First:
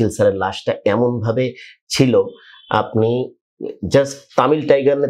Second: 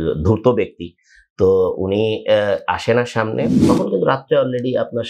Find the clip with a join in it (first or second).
second